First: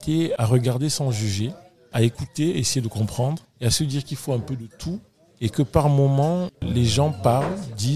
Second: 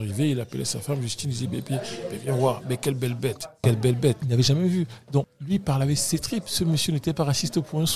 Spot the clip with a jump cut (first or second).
second